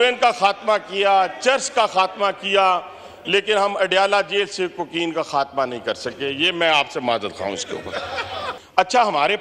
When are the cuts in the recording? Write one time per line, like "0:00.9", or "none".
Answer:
none